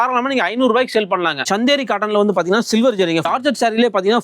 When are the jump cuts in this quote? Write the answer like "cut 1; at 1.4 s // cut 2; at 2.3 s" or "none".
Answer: cut 1; at 1.4 s // cut 2; at 3.3 s